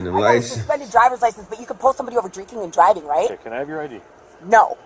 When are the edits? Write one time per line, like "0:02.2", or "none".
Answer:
none